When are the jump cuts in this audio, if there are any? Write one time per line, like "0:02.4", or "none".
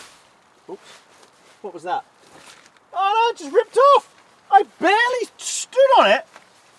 none